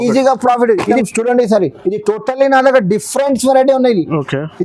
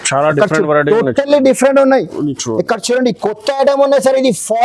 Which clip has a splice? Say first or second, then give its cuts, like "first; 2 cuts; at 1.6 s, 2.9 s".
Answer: first; 1 cut; at 1.0 s